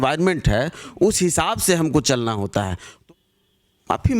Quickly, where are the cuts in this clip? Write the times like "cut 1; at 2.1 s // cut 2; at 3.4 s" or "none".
cut 1; at 2.9 s